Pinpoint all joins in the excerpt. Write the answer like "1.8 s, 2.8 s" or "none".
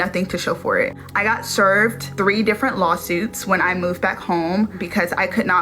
none